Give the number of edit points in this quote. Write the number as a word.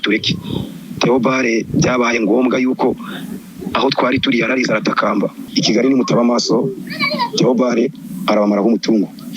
one